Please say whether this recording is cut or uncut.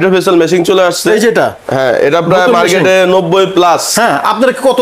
uncut